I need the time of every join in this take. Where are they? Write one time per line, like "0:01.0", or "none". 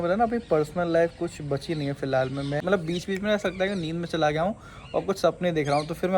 0:02.6